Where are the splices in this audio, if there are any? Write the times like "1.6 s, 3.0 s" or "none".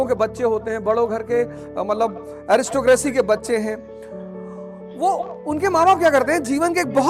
none